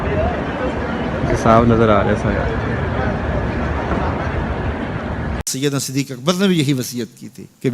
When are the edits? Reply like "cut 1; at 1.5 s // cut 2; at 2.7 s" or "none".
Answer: cut 1; at 5.5 s